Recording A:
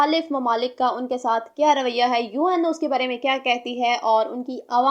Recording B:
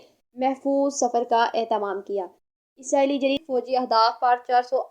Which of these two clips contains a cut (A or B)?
B